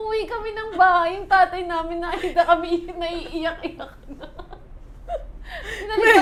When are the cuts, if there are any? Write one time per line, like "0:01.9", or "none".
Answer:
none